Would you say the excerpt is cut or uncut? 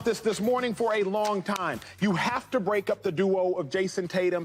uncut